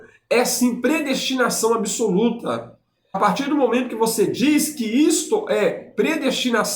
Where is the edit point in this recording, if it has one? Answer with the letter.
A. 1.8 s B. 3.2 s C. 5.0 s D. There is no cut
B